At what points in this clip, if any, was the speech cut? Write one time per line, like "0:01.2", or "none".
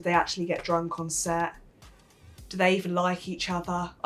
none